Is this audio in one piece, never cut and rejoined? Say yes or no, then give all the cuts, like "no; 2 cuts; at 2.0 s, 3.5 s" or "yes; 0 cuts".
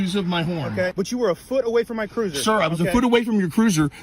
no; 1 cut; at 0.9 s